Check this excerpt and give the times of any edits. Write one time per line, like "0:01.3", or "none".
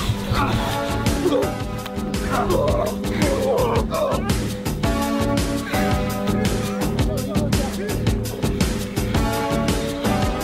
none